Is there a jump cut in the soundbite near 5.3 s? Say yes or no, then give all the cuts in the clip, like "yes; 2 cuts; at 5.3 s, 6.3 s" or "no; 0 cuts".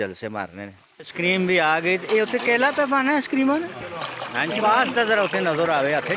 no; 1 cut; at 1.2 s